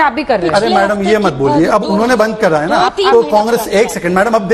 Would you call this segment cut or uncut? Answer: uncut